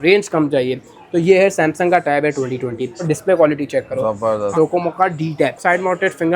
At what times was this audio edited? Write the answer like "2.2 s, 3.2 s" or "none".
3.1 s, 4.5 s, 5.6 s